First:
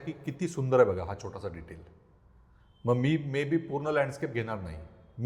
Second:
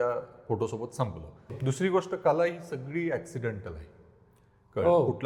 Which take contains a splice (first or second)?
second